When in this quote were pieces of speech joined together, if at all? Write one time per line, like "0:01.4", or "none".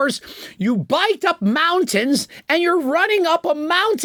none